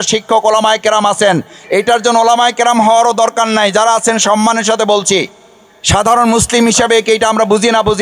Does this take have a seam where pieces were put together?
no; 0 cuts

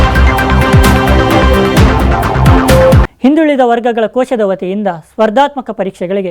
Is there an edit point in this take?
yes; 1 cut; at 3.0 s

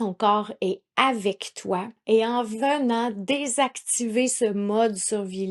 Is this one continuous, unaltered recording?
no; 1 cut; at 1.9 s

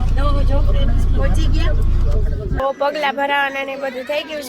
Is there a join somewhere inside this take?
yes; 1 cut; at 2.5 s

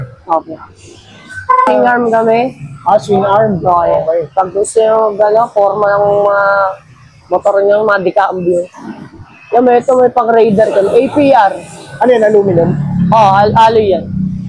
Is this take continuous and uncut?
no; 1 cut; at 1.7 s

